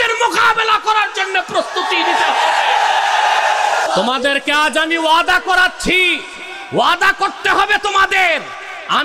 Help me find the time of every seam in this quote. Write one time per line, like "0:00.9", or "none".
0:03.9